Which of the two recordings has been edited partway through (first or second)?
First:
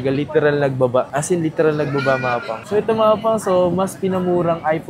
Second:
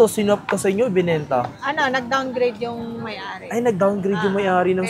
first